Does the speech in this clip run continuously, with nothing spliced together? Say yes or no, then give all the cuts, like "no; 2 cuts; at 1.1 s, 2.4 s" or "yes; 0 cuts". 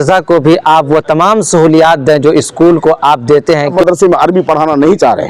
no; 1 cut; at 3.7 s